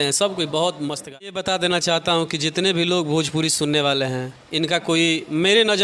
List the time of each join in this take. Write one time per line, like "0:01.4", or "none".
0:01.3